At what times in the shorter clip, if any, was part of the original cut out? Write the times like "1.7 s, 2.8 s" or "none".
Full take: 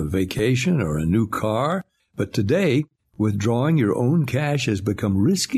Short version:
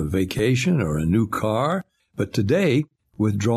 none